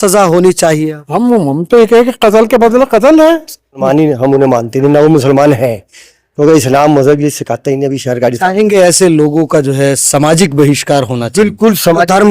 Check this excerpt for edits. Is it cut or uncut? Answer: cut